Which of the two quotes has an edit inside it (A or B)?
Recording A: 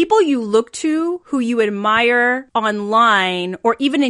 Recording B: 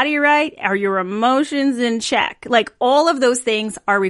A